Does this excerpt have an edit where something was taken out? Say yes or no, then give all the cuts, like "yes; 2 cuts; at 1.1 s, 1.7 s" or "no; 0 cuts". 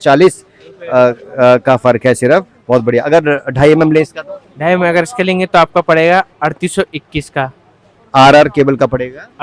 no; 0 cuts